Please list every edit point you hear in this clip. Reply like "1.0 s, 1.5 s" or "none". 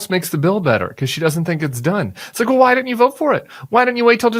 none

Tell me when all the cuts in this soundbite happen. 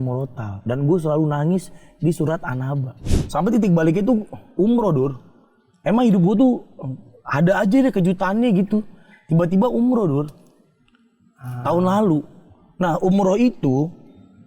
3.0 s

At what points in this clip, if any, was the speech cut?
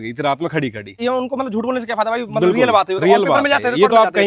1.0 s

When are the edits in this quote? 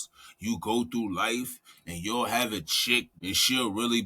3.1 s

